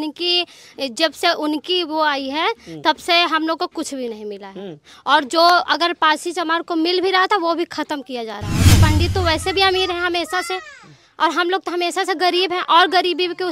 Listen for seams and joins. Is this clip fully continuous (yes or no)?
no